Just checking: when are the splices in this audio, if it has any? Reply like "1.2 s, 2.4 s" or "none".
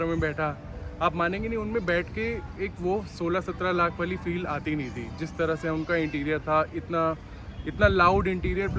none